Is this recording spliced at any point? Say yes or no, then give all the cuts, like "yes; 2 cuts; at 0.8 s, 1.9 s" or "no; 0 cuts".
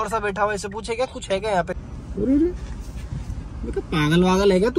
yes; 1 cut; at 1.7 s